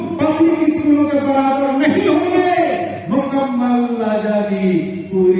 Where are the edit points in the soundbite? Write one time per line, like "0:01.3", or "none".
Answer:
none